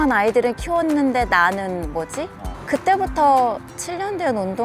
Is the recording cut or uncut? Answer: cut